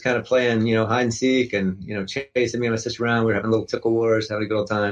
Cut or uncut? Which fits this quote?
uncut